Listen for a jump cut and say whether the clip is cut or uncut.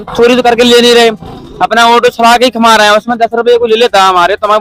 uncut